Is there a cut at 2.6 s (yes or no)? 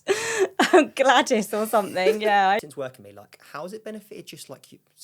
yes